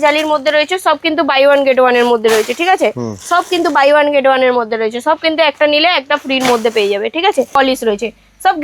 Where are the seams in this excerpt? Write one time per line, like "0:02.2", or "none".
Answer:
0:07.5